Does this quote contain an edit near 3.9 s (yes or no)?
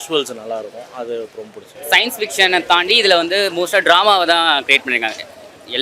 no